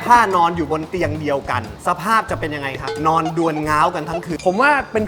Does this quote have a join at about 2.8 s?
yes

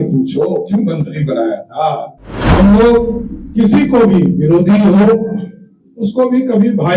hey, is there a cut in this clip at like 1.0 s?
no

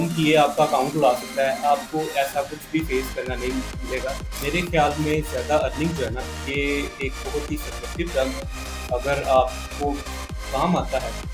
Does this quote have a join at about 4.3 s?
yes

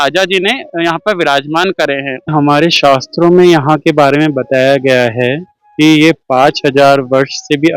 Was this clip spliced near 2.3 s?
yes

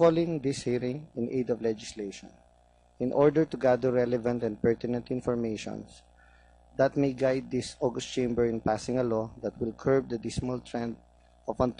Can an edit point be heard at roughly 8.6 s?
yes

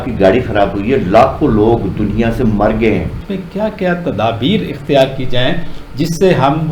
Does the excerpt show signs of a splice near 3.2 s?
yes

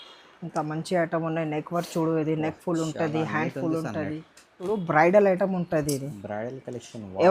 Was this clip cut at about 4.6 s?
yes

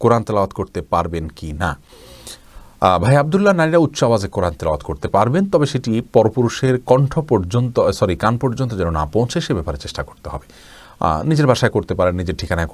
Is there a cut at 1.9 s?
no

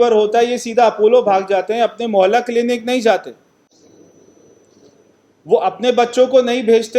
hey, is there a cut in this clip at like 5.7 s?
no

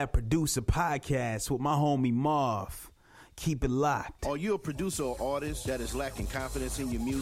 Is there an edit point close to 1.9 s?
no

